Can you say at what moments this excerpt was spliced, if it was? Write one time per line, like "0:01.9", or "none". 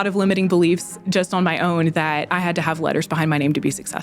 none